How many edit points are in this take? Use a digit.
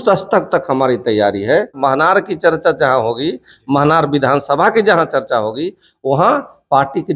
1